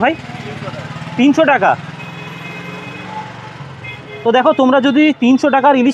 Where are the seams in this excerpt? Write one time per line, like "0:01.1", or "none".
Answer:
none